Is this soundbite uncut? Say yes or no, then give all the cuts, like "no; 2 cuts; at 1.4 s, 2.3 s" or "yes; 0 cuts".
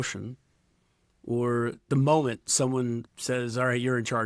no; 1 cut; at 3.1 s